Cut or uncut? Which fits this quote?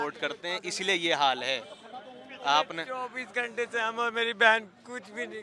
uncut